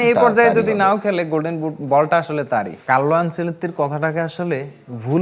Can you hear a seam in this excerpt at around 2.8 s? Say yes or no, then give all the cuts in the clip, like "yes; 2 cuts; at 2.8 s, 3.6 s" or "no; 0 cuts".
yes; 1 cut; at 2.8 s